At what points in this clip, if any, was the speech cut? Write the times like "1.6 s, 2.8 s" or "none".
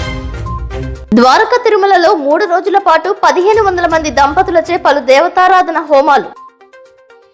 none